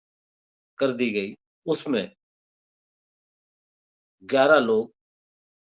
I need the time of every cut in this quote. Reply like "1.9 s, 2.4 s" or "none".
1.5 s